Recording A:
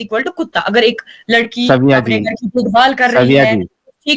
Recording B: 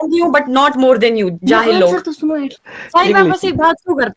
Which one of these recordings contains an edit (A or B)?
B